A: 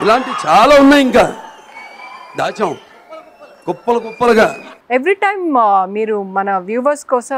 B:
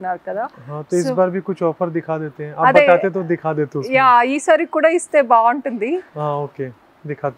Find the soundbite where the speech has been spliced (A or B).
A